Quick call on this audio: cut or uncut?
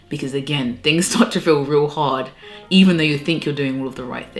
uncut